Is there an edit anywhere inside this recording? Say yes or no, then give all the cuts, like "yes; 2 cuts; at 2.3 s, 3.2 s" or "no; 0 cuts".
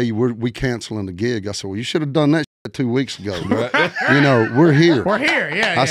no; 0 cuts